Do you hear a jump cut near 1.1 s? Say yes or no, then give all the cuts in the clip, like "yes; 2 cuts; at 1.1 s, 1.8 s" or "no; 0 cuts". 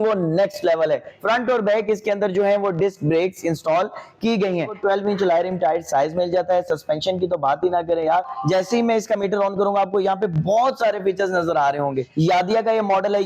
yes; 4 cuts; at 1.1 s, 4.7 s, 8.3 s, 12.1 s